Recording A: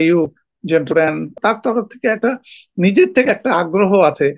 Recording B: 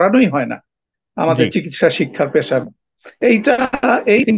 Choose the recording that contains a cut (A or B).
A